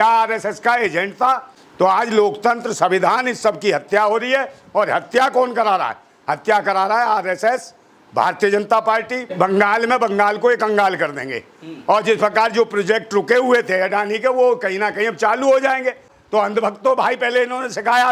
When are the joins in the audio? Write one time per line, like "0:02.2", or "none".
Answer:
0:01.5
0:09.3
0:16.1